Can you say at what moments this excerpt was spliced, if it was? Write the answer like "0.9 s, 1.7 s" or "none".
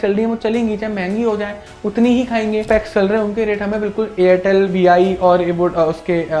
2.7 s